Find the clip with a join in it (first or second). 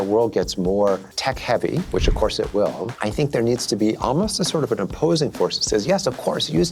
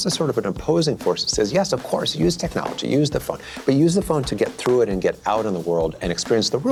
first